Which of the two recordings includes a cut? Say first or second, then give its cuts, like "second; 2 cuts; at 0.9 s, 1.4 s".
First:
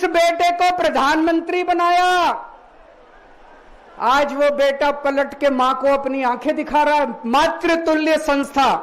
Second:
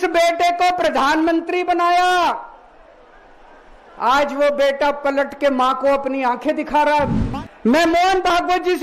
second; 1 cut; at 7.2 s